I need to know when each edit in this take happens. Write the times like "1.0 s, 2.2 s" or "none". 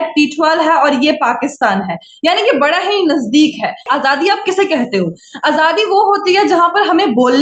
3.9 s